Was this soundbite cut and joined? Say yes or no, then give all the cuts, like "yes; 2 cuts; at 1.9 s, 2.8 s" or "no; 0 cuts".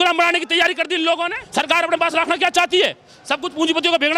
yes; 1 cut; at 1.4 s